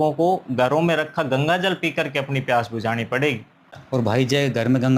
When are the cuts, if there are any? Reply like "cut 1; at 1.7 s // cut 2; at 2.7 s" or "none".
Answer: cut 1; at 3.7 s